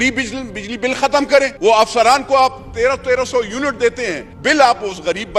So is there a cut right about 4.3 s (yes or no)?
yes